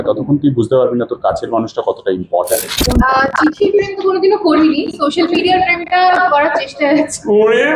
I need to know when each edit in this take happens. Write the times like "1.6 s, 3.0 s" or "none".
2.8 s